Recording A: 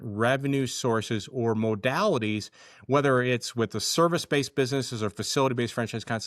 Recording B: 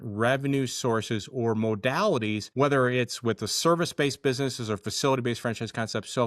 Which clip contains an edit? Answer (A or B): B